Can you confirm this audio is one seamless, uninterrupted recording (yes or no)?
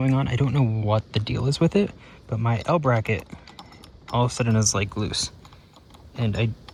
yes